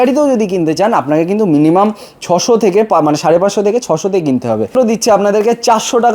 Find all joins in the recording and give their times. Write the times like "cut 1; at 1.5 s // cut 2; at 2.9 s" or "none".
cut 1; at 4.7 s

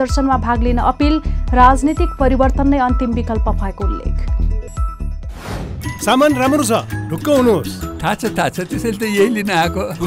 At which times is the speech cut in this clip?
cut 1; at 5.8 s

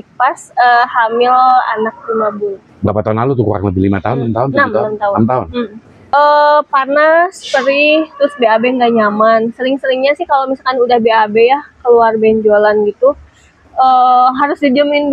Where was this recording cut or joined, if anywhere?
cut 1; at 6.1 s

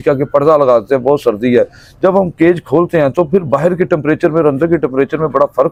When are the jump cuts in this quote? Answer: none

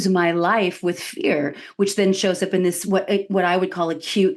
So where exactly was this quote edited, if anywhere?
none

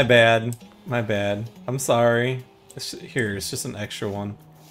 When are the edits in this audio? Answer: cut 1; at 1.5 s

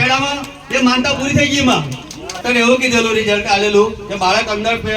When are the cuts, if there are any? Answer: cut 1; at 2.4 s

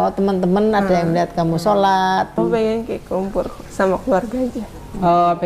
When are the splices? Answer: cut 1; at 2.4 s

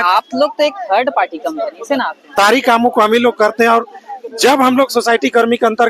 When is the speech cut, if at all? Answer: cut 1; at 2.2 s

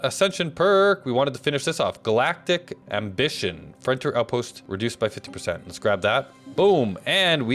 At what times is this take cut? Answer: cut 1; at 2.8 s // cut 2; at 4.6 s

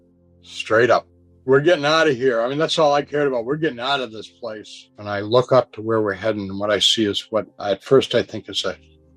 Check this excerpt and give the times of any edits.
cut 1; at 5.0 s

